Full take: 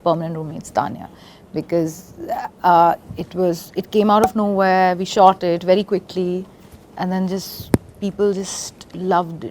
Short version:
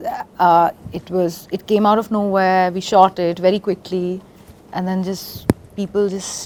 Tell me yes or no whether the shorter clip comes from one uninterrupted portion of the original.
yes